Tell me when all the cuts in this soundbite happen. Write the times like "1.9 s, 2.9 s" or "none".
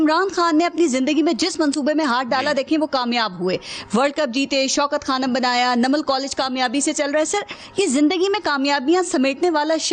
none